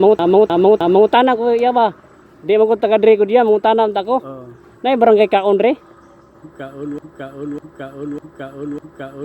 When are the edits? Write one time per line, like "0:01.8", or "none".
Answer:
0:01.1